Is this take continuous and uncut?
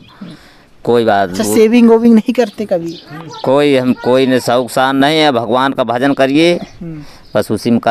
yes; 0 cuts

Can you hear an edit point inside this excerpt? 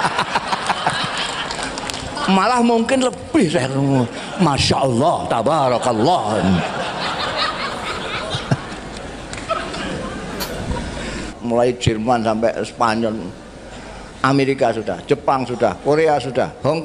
yes; 1 cut; at 11.3 s

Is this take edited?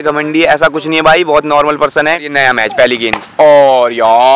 yes; 1 cut; at 2.3 s

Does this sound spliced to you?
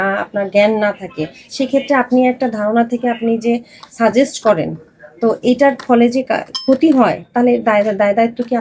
no; 0 cuts

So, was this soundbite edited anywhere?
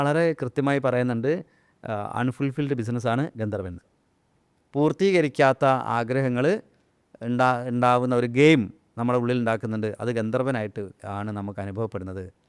no; 0 cuts

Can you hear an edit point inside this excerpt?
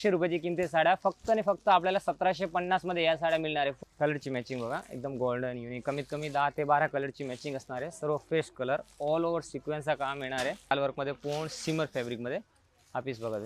yes; 2 cuts; at 3.8 s, 10.7 s

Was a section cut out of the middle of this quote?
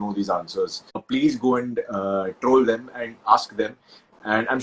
yes; 1 cut; at 1.1 s

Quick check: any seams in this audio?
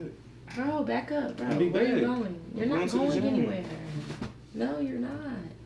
no; 0 cuts

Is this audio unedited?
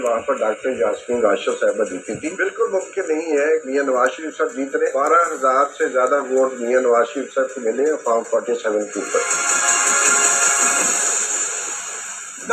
yes; 0 cuts

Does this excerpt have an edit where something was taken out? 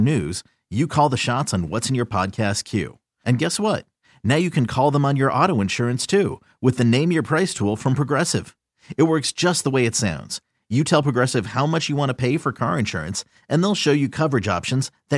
no; 0 cuts

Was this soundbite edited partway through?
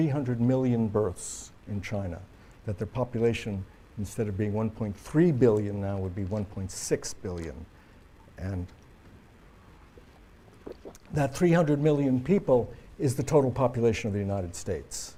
no; 0 cuts

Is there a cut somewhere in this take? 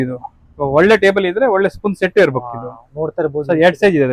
no; 0 cuts

